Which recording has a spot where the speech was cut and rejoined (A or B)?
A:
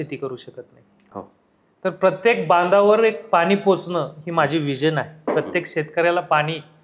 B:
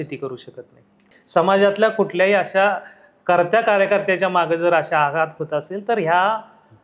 B